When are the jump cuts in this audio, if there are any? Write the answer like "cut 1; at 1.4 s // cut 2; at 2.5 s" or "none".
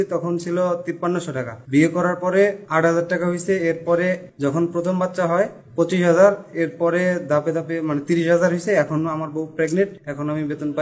cut 1; at 1.1 s // cut 2; at 2.6 s // cut 3; at 4.3 s // cut 4; at 5.6 s // cut 5; at 9.7 s